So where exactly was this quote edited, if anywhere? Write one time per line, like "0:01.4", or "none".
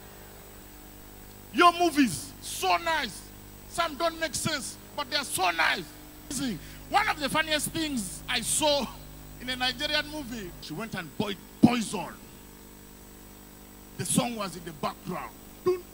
0:06.3
0:10.6